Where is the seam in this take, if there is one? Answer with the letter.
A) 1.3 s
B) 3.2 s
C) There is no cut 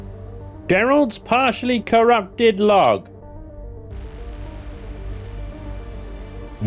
C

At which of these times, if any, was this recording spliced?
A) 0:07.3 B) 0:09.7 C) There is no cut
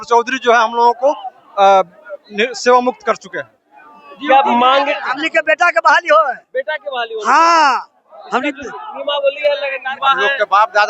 B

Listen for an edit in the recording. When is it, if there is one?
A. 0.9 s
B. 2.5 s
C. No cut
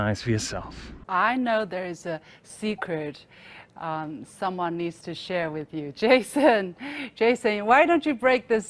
A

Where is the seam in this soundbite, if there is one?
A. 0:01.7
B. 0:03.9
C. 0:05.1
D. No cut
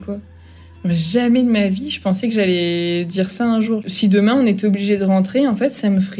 B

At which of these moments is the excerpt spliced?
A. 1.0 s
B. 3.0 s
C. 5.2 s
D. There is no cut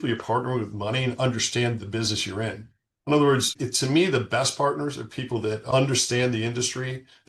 D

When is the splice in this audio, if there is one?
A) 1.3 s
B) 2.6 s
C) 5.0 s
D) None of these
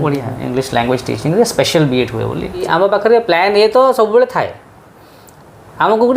B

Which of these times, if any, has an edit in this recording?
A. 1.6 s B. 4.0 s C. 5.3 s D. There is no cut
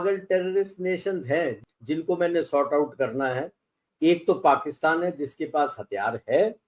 A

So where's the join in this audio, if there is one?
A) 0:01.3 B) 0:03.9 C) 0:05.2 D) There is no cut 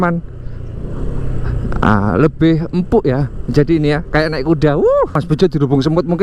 C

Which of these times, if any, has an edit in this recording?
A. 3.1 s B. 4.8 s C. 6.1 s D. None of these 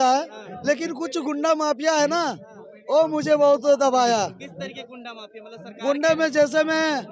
D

